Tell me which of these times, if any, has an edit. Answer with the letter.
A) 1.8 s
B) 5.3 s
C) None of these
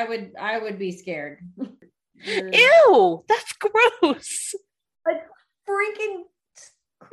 A